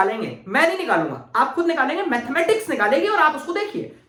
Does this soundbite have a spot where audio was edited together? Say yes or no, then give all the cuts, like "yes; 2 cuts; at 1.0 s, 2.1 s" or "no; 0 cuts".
no; 0 cuts